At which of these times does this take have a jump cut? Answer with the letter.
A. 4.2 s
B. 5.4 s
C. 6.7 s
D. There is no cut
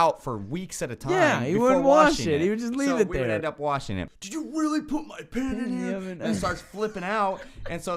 A